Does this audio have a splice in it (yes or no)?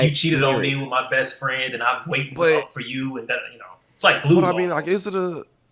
no